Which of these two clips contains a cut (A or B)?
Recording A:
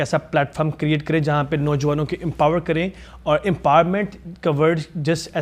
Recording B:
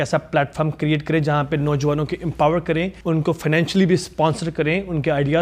B